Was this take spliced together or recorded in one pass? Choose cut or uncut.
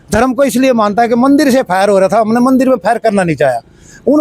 uncut